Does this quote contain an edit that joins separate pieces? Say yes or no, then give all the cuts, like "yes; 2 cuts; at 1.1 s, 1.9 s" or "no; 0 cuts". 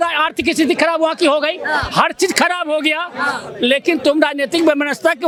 no; 0 cuts